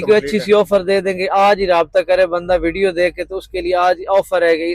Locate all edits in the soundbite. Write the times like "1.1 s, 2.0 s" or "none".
none